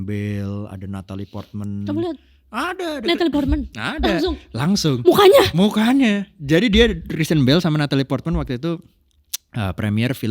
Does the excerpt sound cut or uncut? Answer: uncut